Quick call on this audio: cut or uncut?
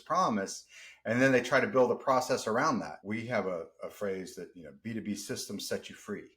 cut